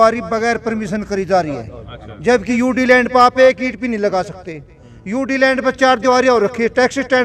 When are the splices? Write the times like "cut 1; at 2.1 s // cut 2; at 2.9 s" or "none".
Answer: none